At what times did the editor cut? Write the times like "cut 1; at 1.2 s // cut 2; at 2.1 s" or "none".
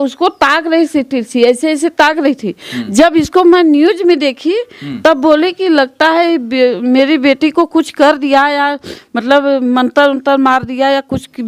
none